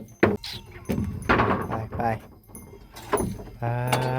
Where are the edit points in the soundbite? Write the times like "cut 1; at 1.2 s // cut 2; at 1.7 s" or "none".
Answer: cut 1; at 1.1 s